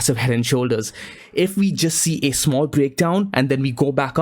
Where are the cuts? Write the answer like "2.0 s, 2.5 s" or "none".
1.2 s